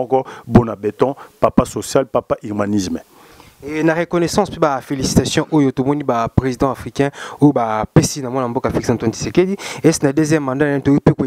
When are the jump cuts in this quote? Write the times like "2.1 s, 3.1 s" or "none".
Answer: none